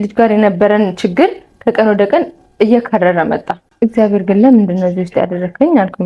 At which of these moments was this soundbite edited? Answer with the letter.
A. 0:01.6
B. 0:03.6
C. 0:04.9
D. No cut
B